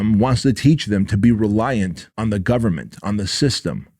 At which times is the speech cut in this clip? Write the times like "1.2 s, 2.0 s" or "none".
2.0 s